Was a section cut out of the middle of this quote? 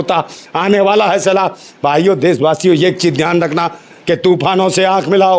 no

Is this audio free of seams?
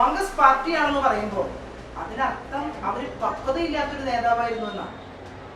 yes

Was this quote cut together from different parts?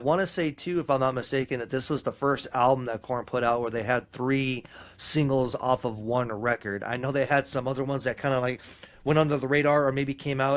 no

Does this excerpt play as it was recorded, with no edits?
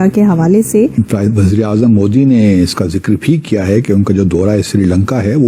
no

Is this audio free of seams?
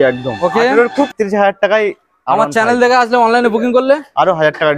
no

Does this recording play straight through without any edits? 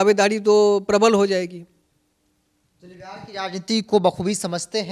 yes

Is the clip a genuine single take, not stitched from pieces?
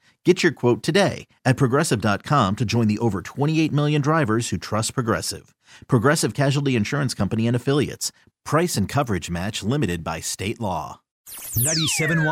no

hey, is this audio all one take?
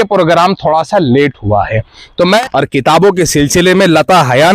no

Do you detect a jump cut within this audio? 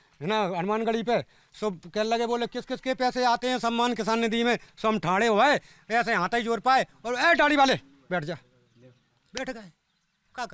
no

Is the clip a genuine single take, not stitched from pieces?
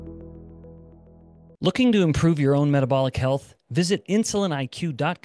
no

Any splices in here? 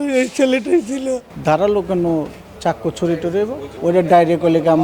yes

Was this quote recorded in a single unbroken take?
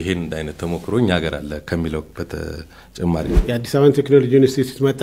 no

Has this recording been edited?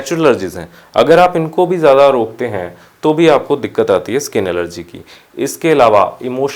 no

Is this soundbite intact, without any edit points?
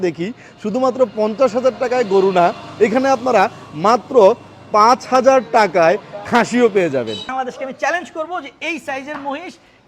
no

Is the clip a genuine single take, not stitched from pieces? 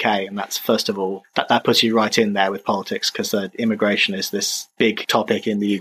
no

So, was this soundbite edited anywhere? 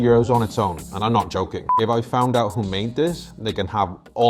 yes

